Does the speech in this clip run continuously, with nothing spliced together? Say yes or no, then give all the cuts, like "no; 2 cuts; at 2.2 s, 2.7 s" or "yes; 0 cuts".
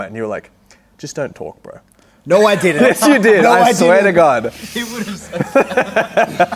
yes; 0 cuts